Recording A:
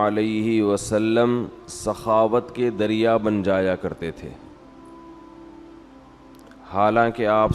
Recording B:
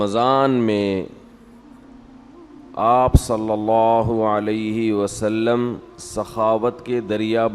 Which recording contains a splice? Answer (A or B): A